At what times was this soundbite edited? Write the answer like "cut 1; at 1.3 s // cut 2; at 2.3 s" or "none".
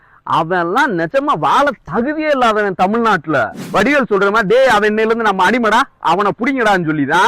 cut 1; at 3.6 s